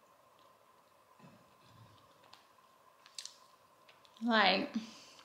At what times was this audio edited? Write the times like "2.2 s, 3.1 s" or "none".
3.0 s